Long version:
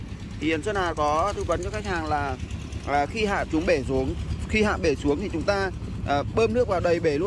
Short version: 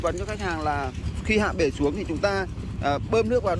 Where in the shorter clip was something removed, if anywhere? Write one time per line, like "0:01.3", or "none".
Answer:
0:01.1